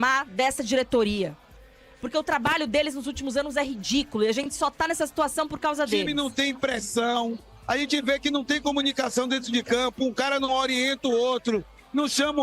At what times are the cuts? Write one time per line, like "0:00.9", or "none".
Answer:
0:06.1